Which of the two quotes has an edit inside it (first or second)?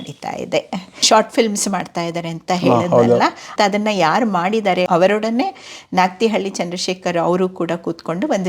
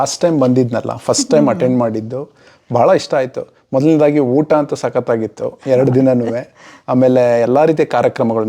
first